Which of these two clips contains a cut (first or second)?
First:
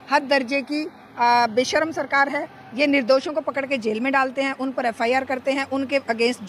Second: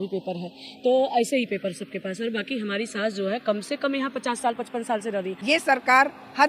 second